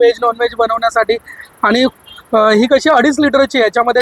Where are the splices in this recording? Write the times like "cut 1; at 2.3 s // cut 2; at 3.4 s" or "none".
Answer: none